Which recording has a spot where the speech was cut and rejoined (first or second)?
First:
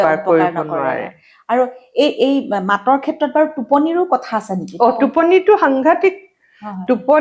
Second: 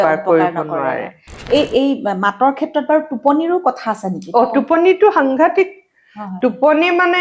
second